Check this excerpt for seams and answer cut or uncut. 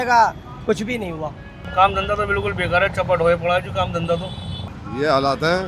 cut